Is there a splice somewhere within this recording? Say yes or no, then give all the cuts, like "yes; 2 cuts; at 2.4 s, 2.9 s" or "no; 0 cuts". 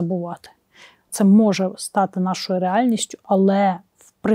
yes; 1 cut; at 1.1 s